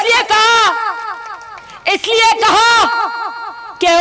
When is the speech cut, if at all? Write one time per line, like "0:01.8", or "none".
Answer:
none